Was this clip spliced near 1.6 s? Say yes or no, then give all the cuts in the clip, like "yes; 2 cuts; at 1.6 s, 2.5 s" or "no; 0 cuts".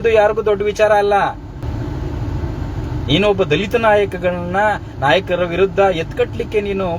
yes; 1 cut; at 1.6 s